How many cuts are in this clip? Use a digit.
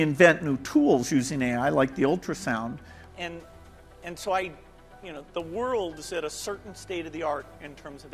1